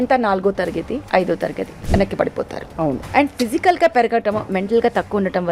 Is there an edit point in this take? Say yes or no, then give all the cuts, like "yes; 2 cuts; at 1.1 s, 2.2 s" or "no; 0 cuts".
yes; 3 cuts; at 1.0 s, 1.7 s, 3.0 s